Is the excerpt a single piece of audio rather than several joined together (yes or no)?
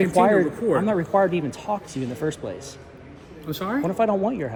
yes